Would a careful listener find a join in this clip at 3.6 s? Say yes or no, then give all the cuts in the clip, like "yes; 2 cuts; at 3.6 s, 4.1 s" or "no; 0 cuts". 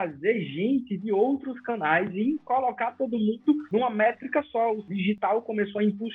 yes; 2 cuts; at 3.6 s, 4.8 s